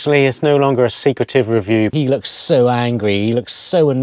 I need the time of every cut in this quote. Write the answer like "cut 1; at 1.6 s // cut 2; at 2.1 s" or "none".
cut 1; at 1.9 s